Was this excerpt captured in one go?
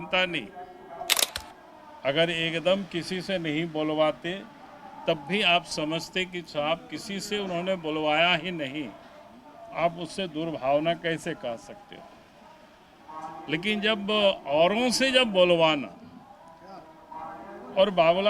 no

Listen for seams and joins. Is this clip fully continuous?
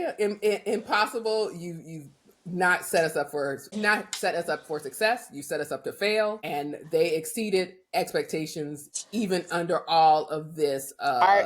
no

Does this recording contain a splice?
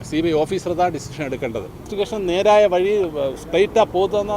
yes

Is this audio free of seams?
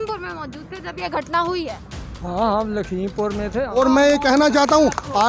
no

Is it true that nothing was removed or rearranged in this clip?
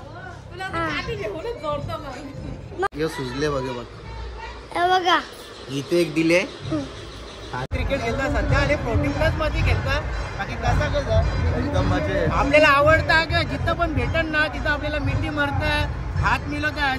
no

